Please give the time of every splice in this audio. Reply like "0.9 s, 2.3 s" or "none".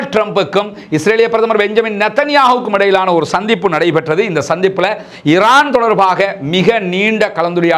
none

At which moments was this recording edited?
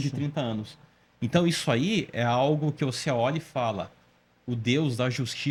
none

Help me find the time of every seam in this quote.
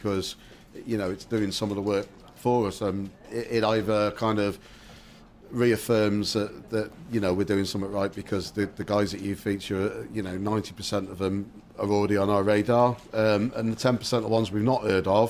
none

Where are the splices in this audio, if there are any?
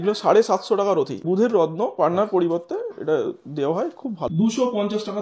1.2 s, 4.3 s

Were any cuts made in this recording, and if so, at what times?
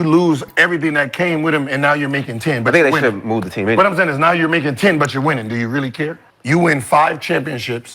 6.3 s

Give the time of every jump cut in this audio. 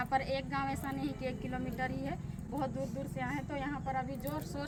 none

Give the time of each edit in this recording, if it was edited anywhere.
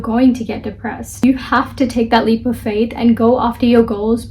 1.2 s

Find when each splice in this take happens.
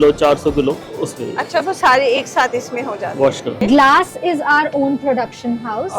0.9 s, 3.6 s

